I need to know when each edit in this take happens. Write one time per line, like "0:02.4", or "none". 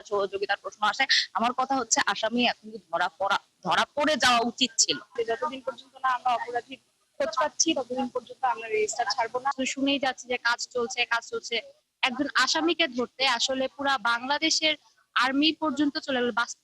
0:05.2
0:09.5